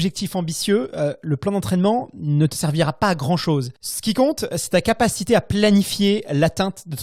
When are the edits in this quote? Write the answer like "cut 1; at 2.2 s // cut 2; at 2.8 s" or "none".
none